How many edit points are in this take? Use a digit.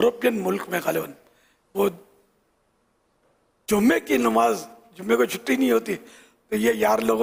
0